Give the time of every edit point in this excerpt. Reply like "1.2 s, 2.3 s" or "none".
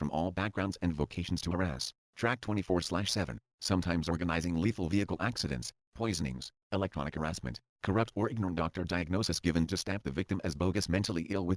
2.6 s, 7.7 s